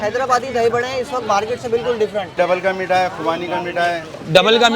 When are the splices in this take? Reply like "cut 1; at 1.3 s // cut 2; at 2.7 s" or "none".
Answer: cut 1; at 2.3 s